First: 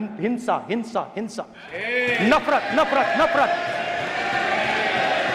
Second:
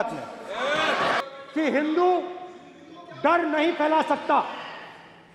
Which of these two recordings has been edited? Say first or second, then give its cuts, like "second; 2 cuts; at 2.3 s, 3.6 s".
second; 1 cut; at 1.2 s